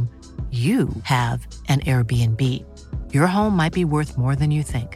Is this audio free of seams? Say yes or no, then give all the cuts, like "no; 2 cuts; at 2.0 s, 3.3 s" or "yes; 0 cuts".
yes; 0 cuts